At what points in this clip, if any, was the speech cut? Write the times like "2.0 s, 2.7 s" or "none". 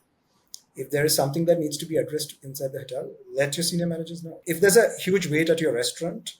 4.3 s